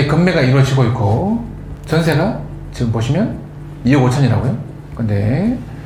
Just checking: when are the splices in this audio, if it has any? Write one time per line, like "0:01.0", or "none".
none